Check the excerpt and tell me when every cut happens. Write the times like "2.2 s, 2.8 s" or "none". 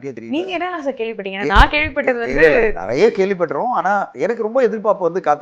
4.1 s